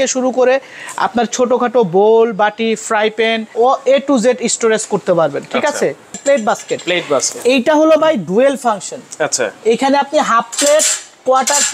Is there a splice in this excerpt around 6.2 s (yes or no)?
yes